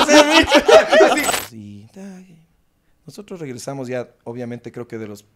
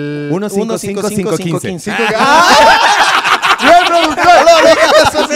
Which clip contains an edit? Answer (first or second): first